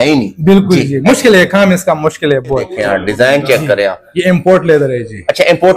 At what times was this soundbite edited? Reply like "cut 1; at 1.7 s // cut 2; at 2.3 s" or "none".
cut 1; at 2.7 s